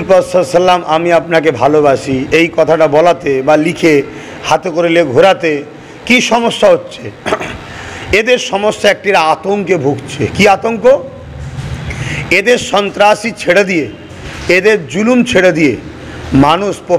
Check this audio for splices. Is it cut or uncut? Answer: uncut